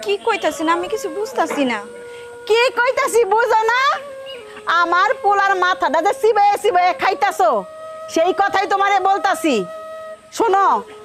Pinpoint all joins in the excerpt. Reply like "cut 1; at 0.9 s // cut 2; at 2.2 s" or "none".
none